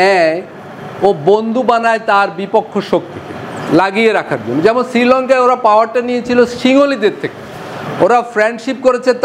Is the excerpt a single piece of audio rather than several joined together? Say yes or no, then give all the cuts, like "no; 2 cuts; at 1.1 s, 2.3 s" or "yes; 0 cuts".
yes; 0 cuts